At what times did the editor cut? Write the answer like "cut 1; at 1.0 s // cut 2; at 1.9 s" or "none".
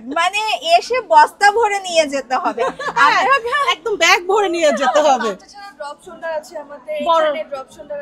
none